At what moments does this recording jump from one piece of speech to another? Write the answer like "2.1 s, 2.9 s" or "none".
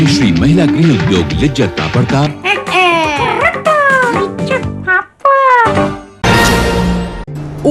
6.1 s